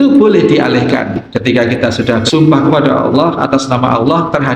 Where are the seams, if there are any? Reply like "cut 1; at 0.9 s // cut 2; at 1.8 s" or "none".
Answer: cut 1; at 1.2 s // cut 2; at 2.3 s